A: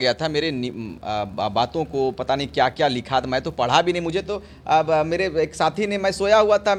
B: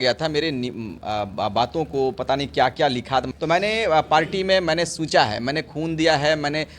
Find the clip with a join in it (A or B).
B